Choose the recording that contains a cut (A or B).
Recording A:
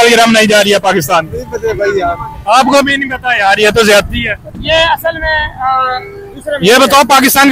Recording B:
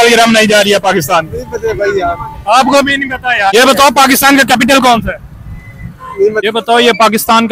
B